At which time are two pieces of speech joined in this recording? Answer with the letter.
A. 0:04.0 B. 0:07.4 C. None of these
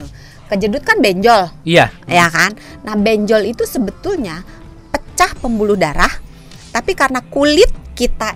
C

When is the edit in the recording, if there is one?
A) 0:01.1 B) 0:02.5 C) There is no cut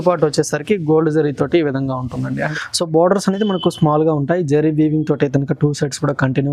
B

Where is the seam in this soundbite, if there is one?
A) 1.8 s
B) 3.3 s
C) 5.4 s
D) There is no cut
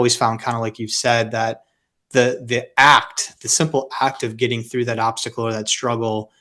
D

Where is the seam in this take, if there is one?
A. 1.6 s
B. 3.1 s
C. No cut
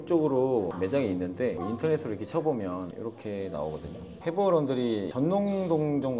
C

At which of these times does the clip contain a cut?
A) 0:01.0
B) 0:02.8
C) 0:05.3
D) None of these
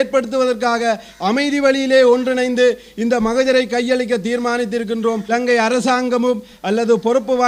C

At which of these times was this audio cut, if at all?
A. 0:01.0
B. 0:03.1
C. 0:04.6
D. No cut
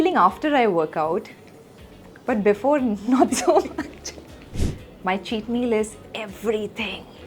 C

